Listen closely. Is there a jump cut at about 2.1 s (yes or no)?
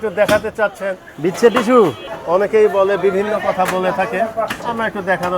yes